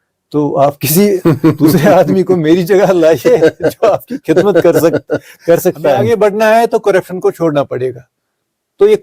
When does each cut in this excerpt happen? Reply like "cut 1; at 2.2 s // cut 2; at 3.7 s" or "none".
cut 1; at 6.0 s